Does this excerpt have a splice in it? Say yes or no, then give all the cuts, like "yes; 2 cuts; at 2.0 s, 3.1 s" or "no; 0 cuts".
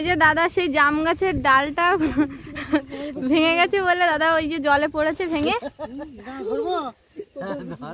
no; 0 cuts